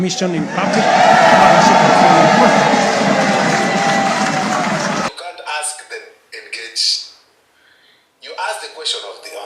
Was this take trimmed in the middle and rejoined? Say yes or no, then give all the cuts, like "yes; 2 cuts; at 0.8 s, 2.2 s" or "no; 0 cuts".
yes; 1 cut; at 5.1 s